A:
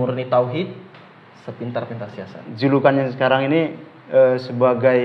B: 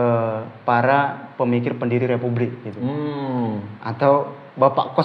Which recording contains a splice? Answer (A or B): A